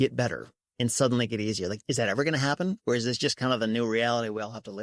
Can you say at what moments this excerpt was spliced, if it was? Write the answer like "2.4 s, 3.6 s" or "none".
1.8 s